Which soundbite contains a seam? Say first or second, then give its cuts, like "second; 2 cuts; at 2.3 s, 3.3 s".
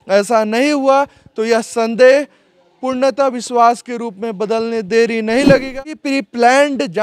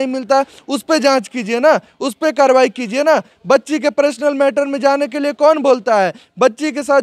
first; 1 cut; at 6.0 s